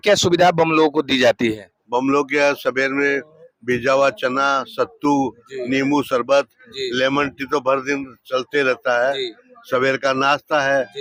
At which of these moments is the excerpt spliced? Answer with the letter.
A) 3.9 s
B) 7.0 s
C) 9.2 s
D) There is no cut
D